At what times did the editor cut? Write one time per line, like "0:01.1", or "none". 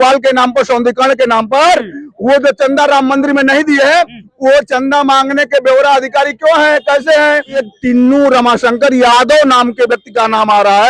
0:07.7